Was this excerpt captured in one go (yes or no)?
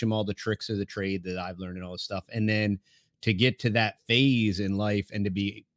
yes